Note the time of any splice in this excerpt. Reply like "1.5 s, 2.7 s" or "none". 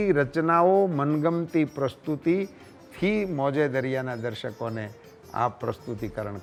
none